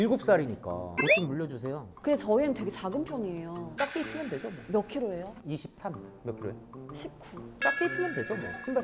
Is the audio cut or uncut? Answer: cut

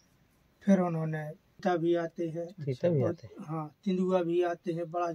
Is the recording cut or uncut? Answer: cut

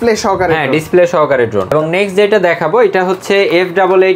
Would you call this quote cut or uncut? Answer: uncut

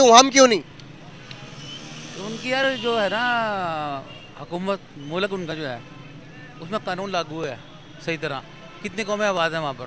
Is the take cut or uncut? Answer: uncut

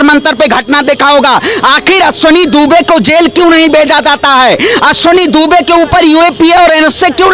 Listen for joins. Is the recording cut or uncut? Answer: uncut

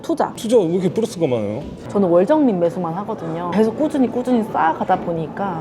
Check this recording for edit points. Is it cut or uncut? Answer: uncut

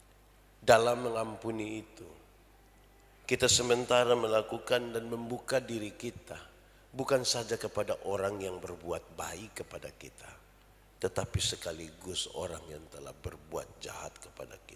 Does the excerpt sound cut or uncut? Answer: uncut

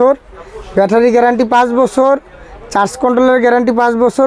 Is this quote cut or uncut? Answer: uncut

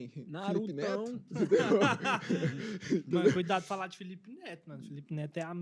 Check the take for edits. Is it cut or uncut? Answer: cut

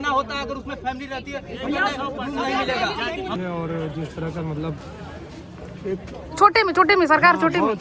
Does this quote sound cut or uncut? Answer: cut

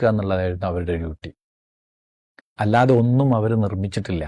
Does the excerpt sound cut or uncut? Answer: uncut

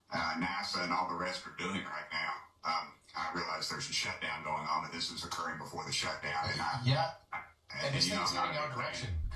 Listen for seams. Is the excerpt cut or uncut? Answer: uncut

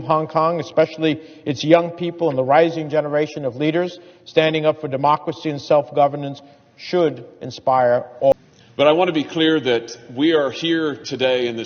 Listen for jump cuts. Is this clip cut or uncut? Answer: cut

